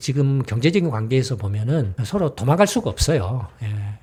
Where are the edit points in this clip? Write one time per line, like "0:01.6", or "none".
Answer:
none